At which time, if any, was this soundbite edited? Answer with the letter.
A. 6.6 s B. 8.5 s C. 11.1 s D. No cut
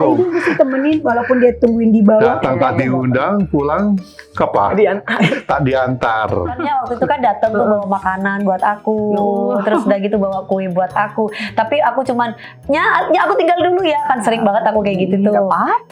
A